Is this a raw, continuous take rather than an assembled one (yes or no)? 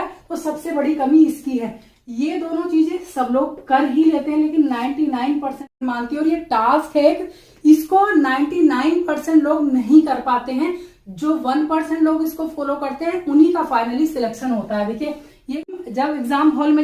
no